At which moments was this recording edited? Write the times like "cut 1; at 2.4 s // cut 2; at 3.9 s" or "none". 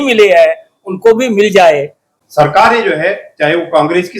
cut 1; at 2.0 s